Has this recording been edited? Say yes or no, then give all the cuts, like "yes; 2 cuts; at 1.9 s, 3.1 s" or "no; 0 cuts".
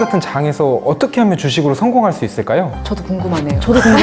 no; 0 cuts